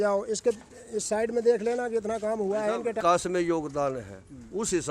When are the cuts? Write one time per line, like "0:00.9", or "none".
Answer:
0:03.0